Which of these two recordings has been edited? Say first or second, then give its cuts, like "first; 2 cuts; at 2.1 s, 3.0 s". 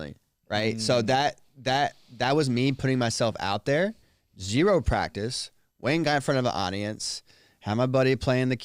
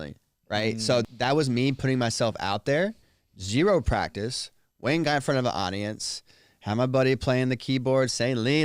second; 1 cut; at 1.0 s